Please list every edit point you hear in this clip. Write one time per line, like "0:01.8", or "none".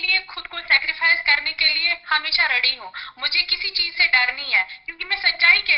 none